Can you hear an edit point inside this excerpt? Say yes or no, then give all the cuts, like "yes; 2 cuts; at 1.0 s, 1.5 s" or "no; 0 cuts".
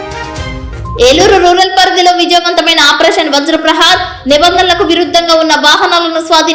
yes; 1 cut; at 0.9 s